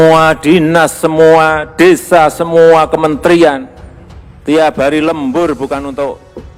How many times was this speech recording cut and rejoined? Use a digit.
0